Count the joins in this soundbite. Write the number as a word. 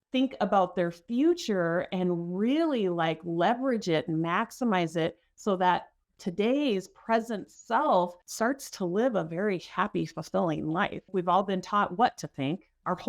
two